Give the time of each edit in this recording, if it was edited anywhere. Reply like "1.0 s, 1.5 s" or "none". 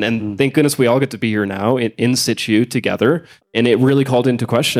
3.4 s